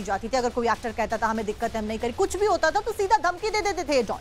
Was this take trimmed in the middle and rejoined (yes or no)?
yes